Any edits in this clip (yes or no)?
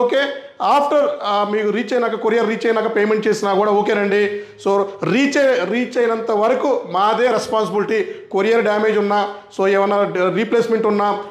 no